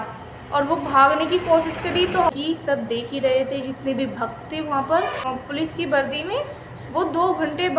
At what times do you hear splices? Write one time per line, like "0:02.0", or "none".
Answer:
0:02.3
0:05.2